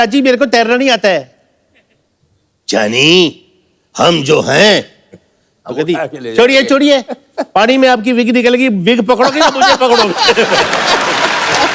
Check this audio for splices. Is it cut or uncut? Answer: uncut